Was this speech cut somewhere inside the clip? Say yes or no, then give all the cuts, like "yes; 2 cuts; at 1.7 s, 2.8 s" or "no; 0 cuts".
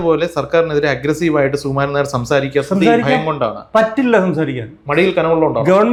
no; 0 cuts